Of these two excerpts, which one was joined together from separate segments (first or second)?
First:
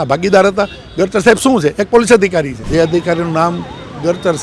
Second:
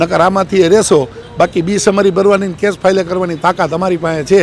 first